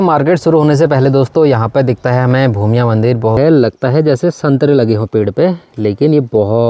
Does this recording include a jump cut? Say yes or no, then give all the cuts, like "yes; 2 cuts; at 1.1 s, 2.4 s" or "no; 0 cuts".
yes; 1 cut; at 3.3 s